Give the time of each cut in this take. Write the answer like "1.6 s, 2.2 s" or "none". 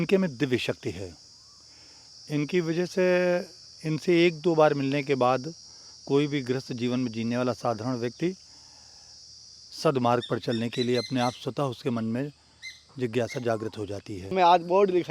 14.1 s